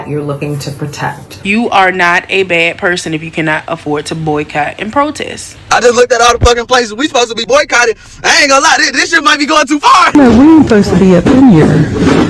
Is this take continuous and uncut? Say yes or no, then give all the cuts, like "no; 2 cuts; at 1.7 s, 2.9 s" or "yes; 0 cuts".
no; 3 cuts; at 1.3 s, 5.5 s, 10.1 s